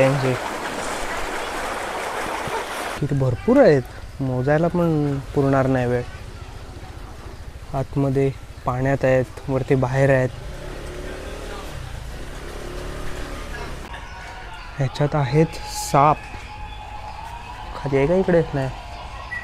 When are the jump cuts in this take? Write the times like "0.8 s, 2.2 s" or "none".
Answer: 3.0 s, 13.8 s